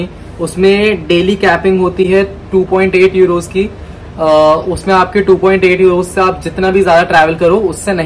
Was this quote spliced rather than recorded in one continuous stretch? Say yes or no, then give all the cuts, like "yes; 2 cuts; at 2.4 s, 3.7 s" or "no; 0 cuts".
no; 0 cuts